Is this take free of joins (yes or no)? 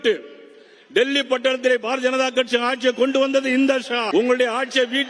no